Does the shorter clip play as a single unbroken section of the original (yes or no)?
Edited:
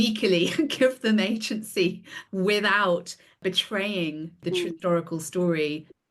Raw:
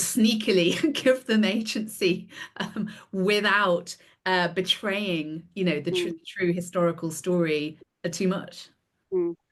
no